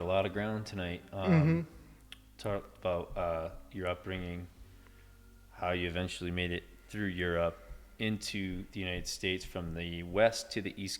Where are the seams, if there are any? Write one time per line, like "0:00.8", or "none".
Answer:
none